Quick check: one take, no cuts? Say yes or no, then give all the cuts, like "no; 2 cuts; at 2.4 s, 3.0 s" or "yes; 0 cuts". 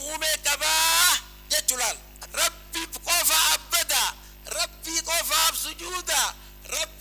no; 1 cut; at 2.1 s